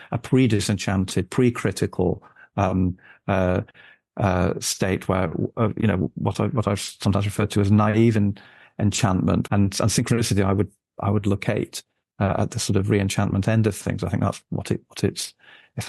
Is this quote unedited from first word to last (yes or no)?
no